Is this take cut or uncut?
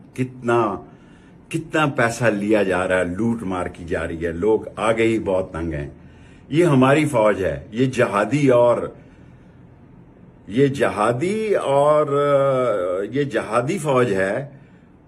uncut